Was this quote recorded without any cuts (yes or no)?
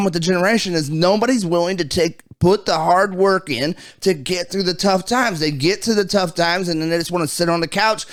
yes